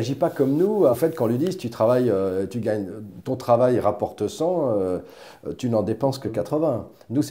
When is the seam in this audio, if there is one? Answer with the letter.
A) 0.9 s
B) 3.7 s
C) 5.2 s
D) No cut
A